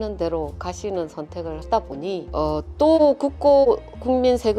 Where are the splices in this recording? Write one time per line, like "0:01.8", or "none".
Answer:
0:02.3